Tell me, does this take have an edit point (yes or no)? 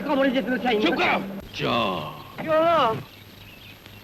yes